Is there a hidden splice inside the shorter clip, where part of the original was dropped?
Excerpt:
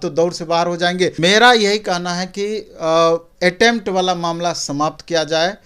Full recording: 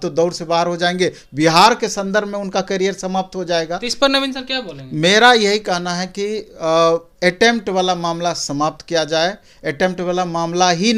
yes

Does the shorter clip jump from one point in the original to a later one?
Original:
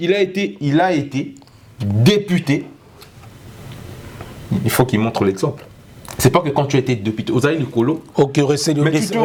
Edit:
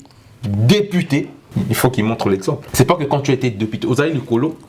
yes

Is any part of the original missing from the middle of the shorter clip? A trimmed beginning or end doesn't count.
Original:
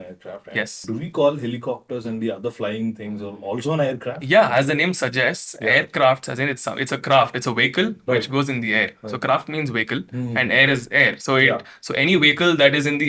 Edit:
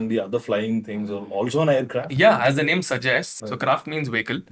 yes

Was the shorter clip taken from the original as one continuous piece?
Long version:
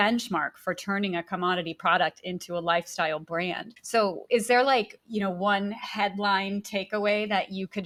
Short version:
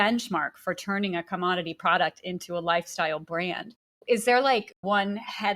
no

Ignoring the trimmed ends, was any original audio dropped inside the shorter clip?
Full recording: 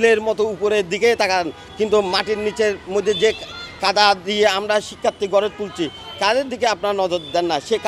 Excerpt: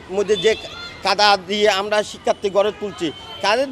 no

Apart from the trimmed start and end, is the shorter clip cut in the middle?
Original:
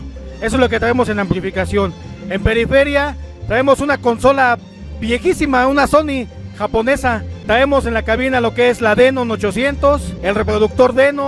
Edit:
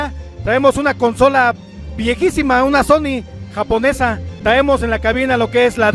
no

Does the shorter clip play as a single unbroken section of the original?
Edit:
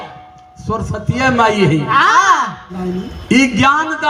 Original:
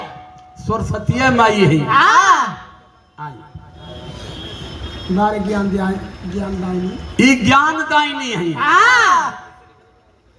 no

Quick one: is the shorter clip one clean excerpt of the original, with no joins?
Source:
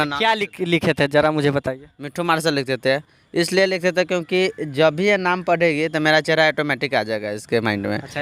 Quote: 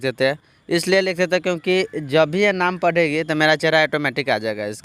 yes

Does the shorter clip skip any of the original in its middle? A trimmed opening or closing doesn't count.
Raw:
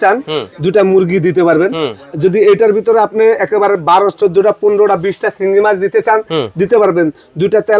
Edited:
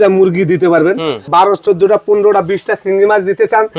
yes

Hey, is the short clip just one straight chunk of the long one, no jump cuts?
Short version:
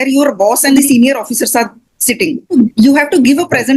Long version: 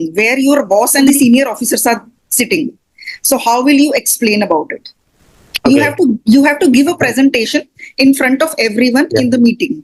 no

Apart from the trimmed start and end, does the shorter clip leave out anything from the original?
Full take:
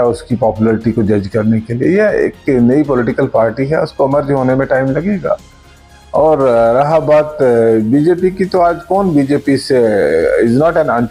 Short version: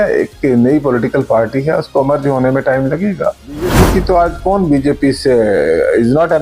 yes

